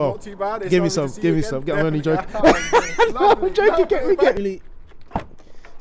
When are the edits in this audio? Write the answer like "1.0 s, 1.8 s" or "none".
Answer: 4.4 s

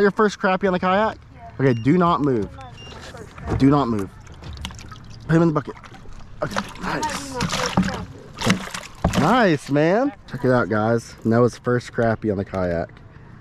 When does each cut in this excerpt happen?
none

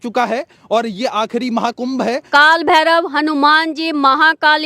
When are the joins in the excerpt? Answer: 2.2 s

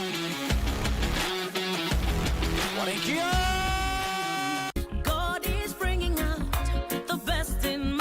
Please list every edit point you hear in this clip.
4.7 s

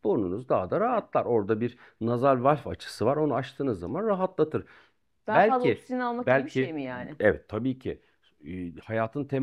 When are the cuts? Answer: none

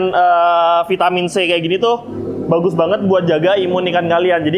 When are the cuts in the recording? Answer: none

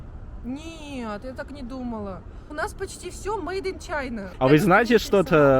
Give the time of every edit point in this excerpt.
2.4 s, 4.3 s

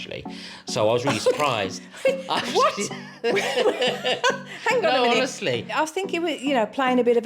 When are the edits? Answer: 5.7 s

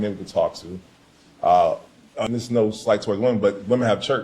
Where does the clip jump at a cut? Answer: 2.3 s

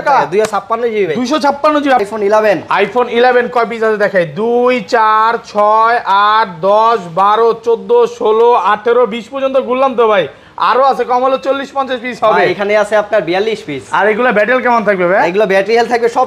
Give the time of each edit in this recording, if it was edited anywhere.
2.0 s

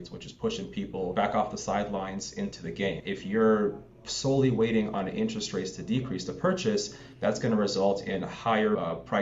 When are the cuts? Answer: 1.1 s, 3.1 s

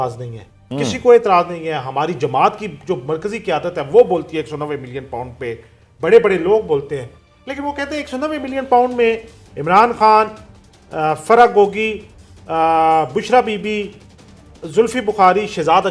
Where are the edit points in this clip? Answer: none

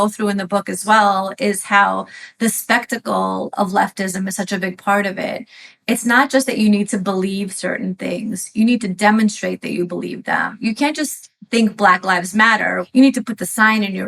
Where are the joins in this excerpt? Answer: 12.8 s

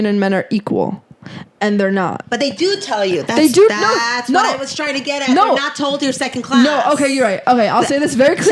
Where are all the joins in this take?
none

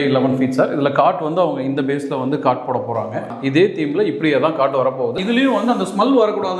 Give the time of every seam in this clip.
3.3 s, 5.1 s

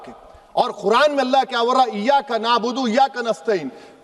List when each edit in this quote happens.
none

